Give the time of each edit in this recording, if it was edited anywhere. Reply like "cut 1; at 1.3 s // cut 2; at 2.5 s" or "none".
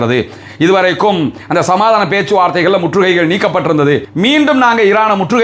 none